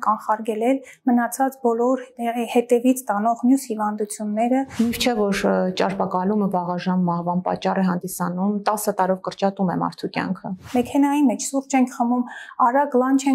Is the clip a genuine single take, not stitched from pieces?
no; 2 cuts; at 4.7 s, 10.6 s

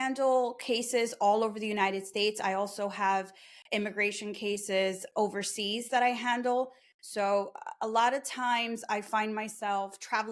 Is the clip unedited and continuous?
yes; 0 cuts

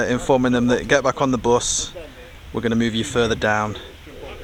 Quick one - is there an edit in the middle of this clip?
no; 0 cuts

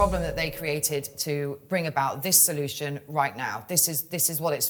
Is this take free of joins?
yes; 0 cuts

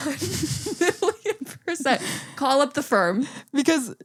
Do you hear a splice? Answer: no; 0 cuts

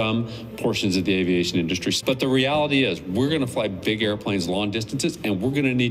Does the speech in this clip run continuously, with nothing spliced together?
no; 1 cut; at 2.0 s

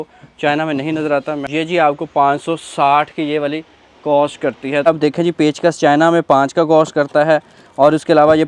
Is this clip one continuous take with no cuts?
no; 2 cuts; at 1.5 s, 4.9 s

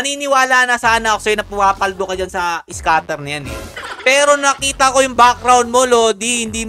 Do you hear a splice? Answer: no; 0 cuts

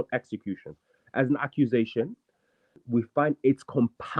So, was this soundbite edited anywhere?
yes; 1 cut; at 2.8 s

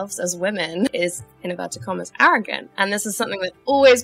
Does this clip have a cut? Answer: yes; 2 cuts; at 0.9 s, 2.6 s

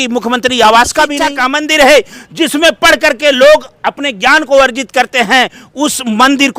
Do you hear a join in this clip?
yes; 1 cut; at 1.3 s

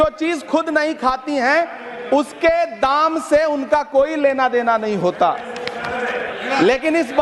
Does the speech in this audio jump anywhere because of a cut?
no; 0 cuts

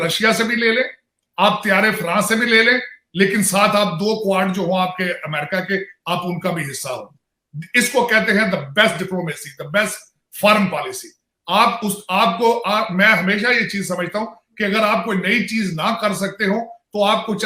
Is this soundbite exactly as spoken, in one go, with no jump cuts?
yes; 0 cuts

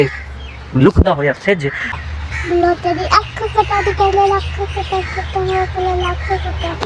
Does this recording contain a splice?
yes; 1 cut; at 2.0 s

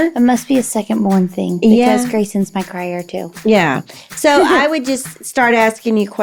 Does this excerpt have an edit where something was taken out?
no; 0 cuts

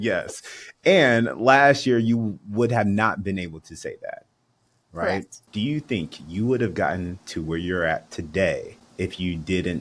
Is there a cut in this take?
yes; 2 cuts; at 5.4 s, 8.8 s

